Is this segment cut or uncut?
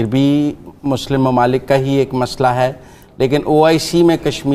uncut